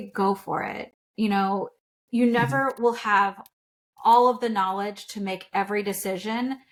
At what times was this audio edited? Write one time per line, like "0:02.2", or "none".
none